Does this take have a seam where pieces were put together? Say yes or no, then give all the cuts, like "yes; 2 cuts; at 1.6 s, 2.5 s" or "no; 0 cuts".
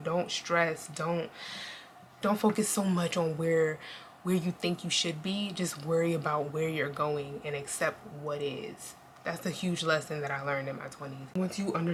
no; 0 cuts